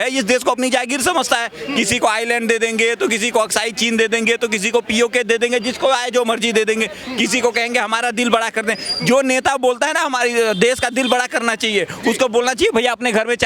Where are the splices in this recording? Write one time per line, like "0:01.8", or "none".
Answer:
none